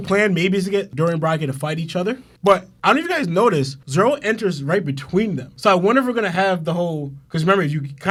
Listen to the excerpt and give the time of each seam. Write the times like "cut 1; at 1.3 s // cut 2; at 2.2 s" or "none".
none